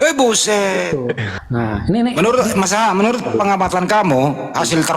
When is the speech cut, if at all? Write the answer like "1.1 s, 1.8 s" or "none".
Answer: 1.3 s